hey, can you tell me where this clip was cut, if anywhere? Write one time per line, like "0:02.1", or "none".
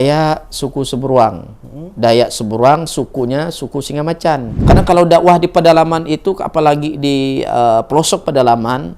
0:04.5